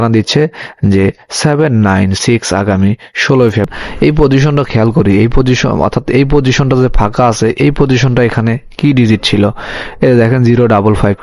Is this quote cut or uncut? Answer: cut